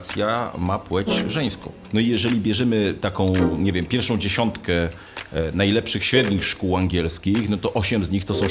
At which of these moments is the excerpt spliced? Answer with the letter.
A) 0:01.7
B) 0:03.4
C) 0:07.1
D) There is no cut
A